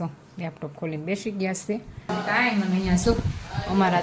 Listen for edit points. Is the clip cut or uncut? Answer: cut